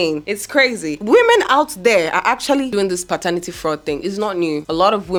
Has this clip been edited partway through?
no; 0 cuts

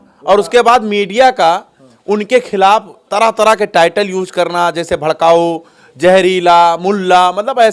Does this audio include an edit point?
no; 0 cuts

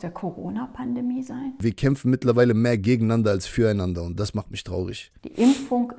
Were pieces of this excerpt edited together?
yes; 2 cuts; at 1.6 s, 5.1 s

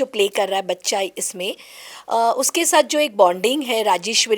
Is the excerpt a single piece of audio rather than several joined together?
yes; 0 cuts

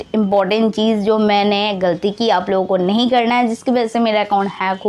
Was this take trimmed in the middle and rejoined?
no; 0 cuts

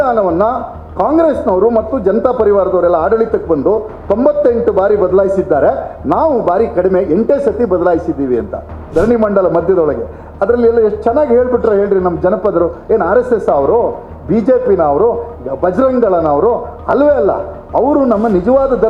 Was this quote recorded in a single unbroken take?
no; 1 cut; at 8.9 s

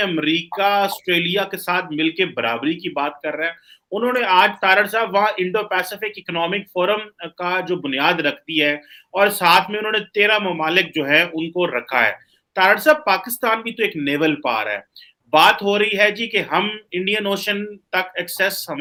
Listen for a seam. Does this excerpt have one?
no; 0 cuts

